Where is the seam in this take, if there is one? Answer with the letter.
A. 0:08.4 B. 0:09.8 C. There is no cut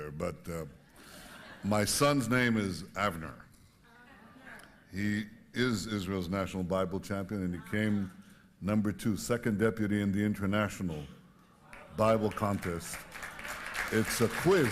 B